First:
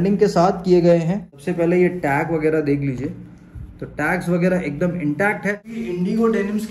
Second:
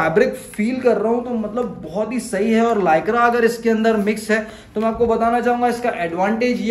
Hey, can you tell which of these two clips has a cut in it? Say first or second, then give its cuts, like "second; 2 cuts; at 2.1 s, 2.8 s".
first; 2 cuts; at 1.4 s, 5.7 s